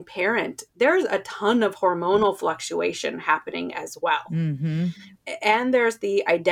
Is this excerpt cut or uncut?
cut